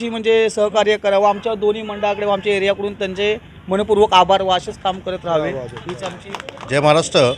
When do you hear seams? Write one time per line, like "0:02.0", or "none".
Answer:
0:06.3